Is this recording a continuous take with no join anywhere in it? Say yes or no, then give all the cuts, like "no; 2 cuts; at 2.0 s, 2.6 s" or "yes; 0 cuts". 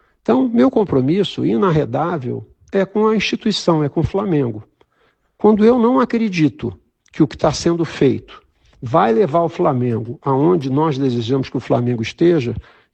yes; 0 cuts